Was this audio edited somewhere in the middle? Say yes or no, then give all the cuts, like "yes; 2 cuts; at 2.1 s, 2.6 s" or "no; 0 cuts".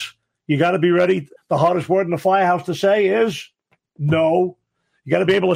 yes; 1 cut; at 1.3 s